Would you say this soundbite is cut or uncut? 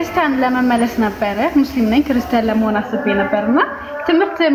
uncut